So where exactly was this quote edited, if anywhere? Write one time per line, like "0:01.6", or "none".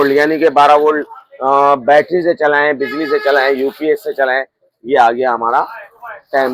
none